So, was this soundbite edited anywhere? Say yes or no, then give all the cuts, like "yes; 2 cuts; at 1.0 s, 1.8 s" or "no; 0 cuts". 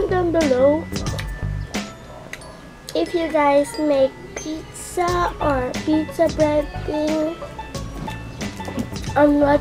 no; 0 cuts